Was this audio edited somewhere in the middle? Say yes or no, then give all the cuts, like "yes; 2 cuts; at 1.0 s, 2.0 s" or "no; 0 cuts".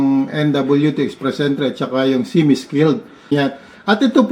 yes; 1 cut; at 3.3 s